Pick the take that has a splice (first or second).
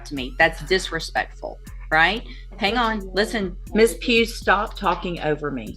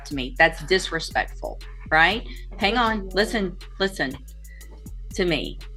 first